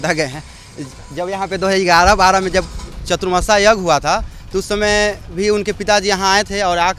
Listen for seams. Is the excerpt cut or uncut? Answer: uncut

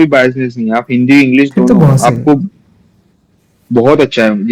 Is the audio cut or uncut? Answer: uncut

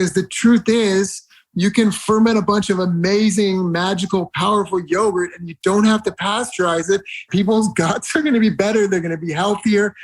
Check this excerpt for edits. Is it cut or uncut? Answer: cut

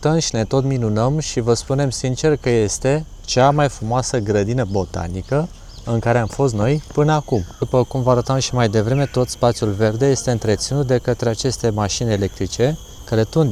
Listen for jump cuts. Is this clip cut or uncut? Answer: uncut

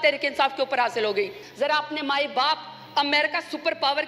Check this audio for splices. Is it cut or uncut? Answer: cut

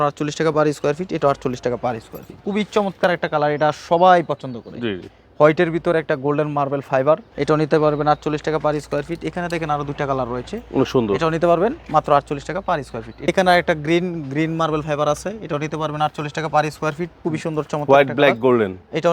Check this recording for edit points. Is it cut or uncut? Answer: cut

